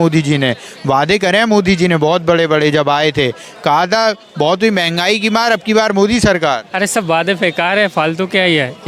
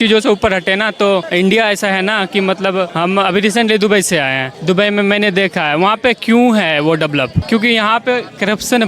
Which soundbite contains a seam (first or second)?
second